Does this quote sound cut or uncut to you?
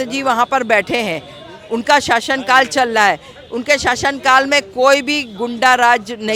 uncut